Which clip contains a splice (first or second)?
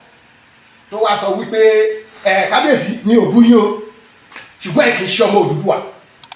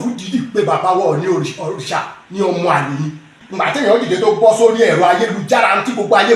second